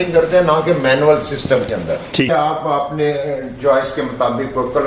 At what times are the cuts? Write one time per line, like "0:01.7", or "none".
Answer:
0:02.3

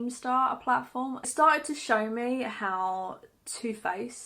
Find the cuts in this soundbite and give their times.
0:01.3

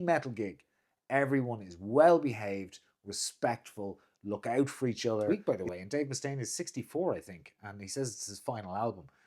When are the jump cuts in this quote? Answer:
0:05.3

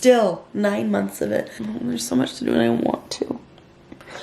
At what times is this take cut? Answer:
0:01.6

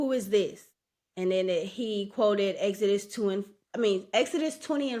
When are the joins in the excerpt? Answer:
none

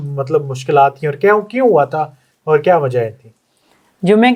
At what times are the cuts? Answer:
none

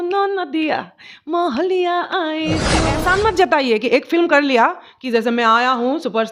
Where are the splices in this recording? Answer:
0:03.0

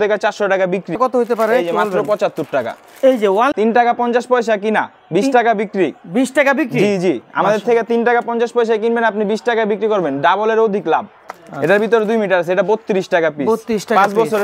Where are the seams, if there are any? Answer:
0:01.0
0:03.5
0:11.2

